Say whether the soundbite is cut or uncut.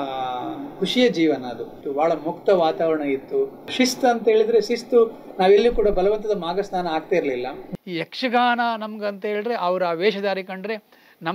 cut